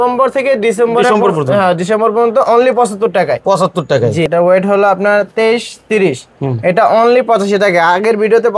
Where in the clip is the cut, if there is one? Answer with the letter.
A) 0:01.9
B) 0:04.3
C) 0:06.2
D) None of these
B